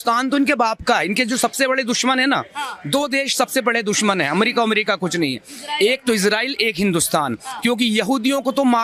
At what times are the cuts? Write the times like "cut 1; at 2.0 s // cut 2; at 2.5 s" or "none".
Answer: none